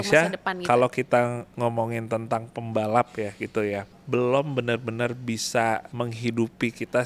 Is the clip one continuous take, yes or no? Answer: no